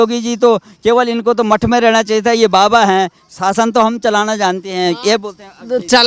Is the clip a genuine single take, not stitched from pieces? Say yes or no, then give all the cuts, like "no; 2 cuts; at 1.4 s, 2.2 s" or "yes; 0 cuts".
yes; 0 cuts